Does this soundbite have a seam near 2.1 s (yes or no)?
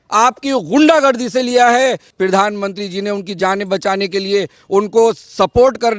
yes